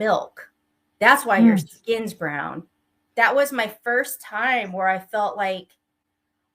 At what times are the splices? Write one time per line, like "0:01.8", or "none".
0:03.1